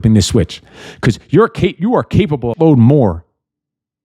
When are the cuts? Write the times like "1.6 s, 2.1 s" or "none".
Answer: 2.5 s